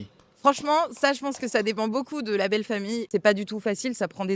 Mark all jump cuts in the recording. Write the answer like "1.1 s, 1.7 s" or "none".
3.1 s